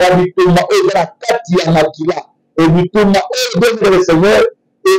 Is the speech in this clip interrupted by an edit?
no; 0 cuts

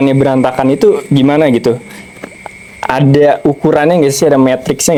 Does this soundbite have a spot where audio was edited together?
no; 0 cuts

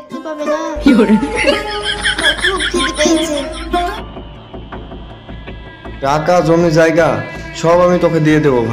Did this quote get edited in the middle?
yes; 1 cut; at 4.0 s

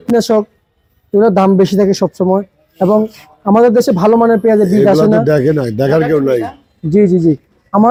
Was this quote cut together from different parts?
no; 0 cuts

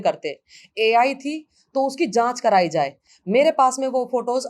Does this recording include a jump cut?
no; 0 cuts

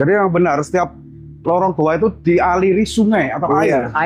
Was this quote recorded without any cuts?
yes; 0 cuts

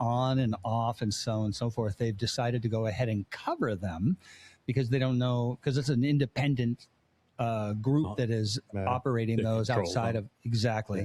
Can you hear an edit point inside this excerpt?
no; 0 cuts

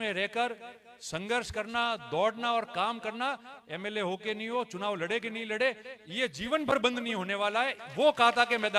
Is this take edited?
no; 0 cuts

